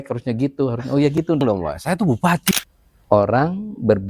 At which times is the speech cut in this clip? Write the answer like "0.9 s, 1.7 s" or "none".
1.4 s, 2.5 s